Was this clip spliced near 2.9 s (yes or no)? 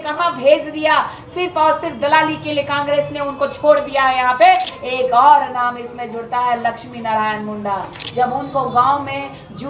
no